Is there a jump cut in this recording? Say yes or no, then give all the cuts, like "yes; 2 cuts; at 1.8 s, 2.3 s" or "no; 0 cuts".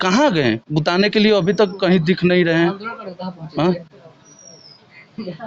no; 0 cuts